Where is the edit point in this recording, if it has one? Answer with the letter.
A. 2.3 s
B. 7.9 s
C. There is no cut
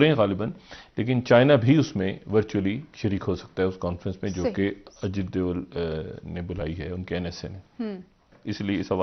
C